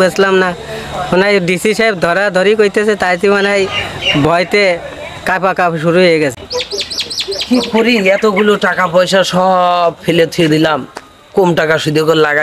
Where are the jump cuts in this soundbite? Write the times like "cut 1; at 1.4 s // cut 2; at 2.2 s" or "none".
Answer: none